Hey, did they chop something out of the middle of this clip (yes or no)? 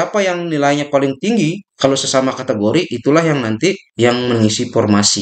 yes